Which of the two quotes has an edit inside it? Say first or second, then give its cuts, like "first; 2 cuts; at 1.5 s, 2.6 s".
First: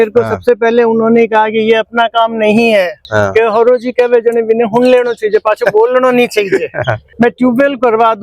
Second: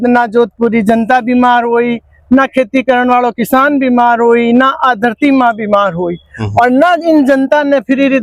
first; 2 cuts; at 3.0 s, 7.0 s